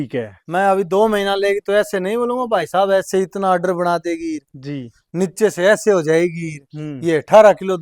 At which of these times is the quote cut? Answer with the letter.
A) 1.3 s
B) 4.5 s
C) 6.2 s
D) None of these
D